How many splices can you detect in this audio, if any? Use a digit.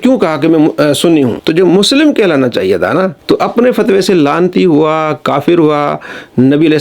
2